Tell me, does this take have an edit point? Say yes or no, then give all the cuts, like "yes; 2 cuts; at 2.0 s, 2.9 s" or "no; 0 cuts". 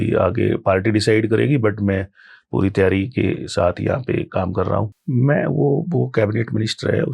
yes; 1 cut; at 4.9 s